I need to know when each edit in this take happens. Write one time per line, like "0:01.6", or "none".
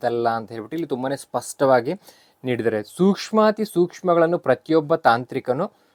none

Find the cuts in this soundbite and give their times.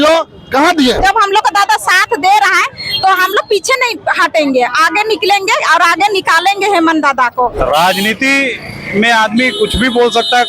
0:01.0
0:07.6

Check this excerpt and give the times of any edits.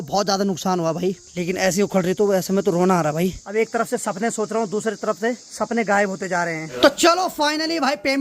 0:01.2
0:03.4
0:05.5
0:06.8

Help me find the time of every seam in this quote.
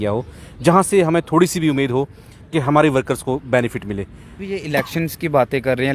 0:04.3

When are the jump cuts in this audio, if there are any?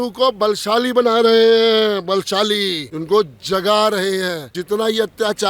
0:02.9
0:04.5

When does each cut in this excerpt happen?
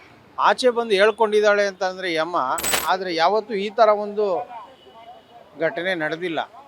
0:02.7

